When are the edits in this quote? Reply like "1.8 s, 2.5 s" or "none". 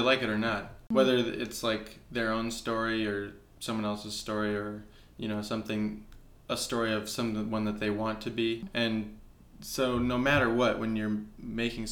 0.9 s, 8.6 s